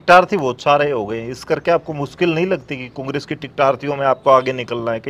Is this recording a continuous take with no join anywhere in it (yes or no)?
yes